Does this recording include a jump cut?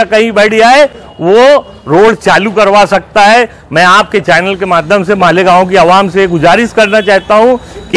no; 0 cuts

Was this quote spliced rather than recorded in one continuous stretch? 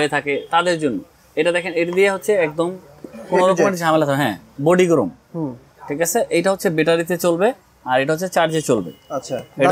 no; 0 cuts

